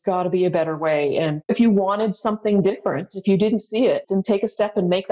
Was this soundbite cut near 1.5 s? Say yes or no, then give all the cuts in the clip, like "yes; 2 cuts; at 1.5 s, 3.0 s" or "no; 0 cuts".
yes; 1 cut; at 1.5 s